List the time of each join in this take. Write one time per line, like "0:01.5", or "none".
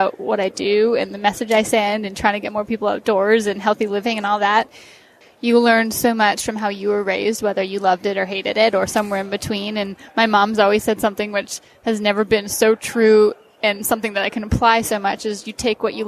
0:05.1